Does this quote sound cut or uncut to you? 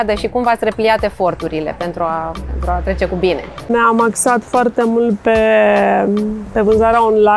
cut